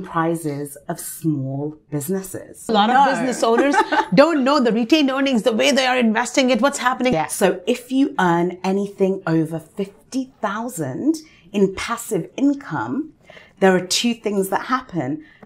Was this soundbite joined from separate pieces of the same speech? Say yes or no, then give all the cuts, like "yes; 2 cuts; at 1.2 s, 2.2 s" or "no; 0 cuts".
yes; 2 cuts; at 2.7 s, 7.1 s